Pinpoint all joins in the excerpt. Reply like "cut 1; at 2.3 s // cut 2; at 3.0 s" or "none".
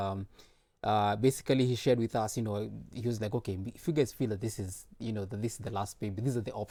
none